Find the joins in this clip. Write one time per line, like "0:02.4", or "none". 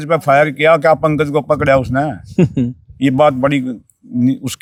none